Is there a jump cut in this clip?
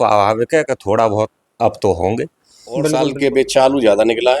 yes; 1 cut; at 2.8 s

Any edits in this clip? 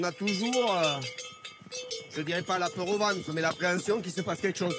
no; 0 cuts

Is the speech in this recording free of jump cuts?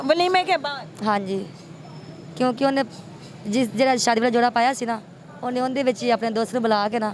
yes; 0 cuts

